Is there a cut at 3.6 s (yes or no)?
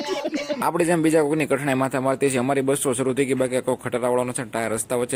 no